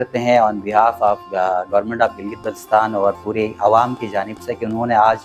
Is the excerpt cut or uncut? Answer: uncut